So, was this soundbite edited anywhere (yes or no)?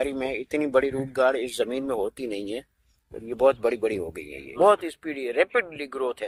no